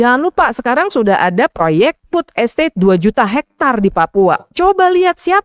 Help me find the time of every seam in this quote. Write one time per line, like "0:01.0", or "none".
0:02.0